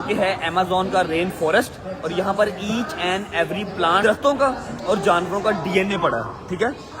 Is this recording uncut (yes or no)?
no